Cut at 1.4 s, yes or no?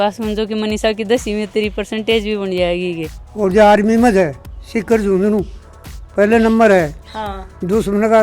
no